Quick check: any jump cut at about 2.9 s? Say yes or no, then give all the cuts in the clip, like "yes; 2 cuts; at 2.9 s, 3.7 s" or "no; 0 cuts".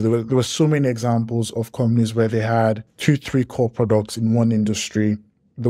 yes; 1 cut; at 2.9 s